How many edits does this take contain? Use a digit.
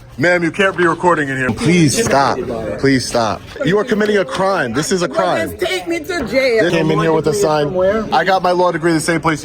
4